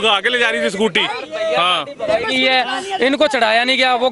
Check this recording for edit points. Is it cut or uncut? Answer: uncut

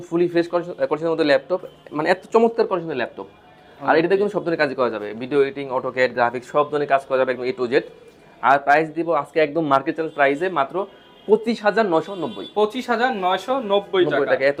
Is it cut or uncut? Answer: uncut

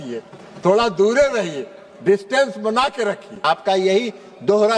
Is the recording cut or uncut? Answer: cut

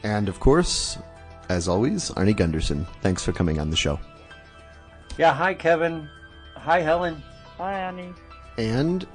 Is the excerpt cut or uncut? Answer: uncut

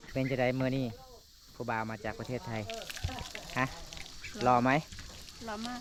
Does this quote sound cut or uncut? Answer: uncut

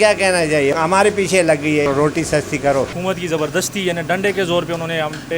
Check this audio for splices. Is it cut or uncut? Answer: cut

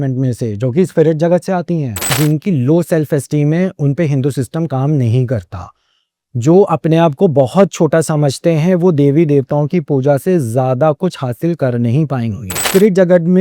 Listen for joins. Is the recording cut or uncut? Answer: cut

